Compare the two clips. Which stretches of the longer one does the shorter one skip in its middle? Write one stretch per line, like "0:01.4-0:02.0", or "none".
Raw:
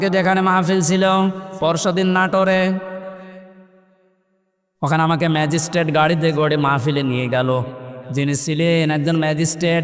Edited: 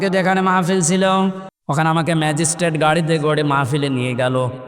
0:01.5-0:04.6